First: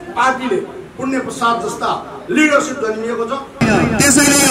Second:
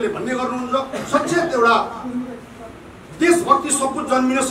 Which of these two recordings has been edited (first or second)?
first